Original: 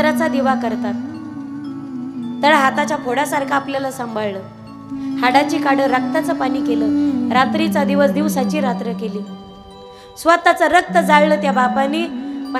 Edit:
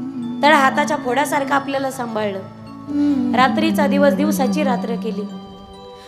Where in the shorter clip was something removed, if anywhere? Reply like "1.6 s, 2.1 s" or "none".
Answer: 2.9 s